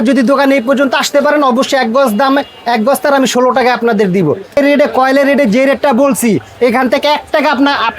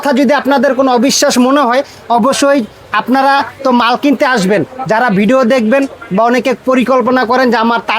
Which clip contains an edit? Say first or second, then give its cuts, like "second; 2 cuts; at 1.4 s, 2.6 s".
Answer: first; 1 cut; at 4.6 s